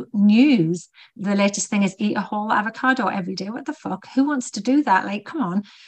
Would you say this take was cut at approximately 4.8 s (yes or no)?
no